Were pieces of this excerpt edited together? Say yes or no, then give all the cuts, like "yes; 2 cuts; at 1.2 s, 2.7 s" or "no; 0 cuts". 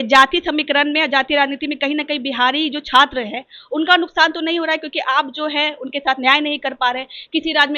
no; 0 cuts